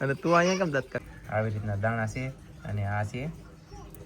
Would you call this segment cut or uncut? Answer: cut